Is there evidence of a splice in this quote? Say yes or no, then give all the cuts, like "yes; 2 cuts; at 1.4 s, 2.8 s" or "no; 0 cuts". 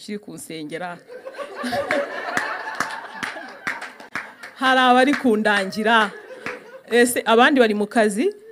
no; 0 cuts